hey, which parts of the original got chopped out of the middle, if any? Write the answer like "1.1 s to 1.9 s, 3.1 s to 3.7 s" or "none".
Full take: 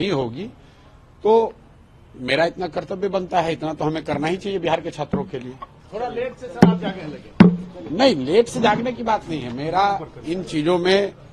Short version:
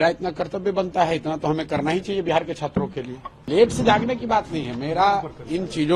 5.8 s to 8.2 s